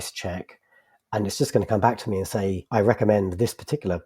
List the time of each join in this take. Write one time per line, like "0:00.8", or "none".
0:02.6